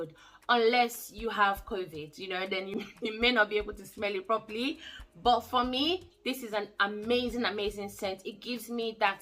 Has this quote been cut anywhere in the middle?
no; 0 cuts

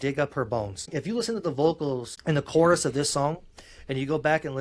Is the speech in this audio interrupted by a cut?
yes; 2 cuts; at 0.9 s, 2.1 s

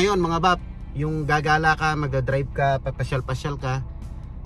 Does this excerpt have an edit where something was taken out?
no; 0 cuts

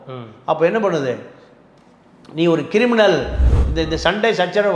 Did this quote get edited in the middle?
yes; 1 cut; at 3.4 s

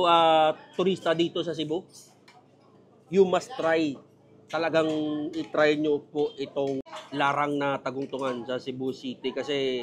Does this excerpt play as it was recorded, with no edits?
no; 1 cut; at 7.0 s

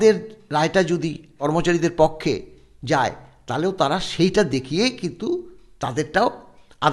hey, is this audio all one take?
no; 1 cut; at 1.4 s

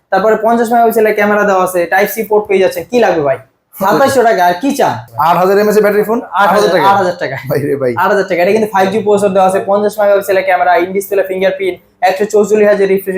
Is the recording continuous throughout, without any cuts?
no; 1 cut; at 5.1 s

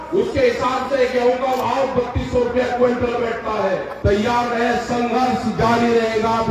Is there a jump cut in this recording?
yes; 1 cut; at 3.9 s

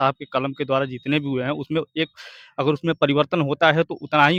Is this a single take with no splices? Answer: yes; 0 cuts

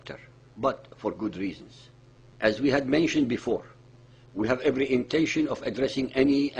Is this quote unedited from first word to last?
no; 1 cut; at 4.0 s

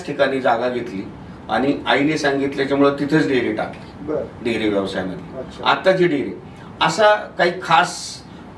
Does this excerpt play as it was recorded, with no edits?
yes; 0 cuts

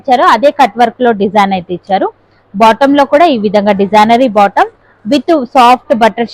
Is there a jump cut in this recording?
no; 0 cuts

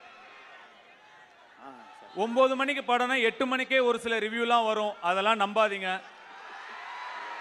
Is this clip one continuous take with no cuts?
yes; 0 cuts

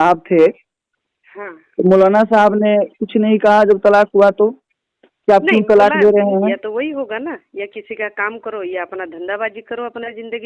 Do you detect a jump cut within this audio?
yes; 1 cut; at 6.5 s

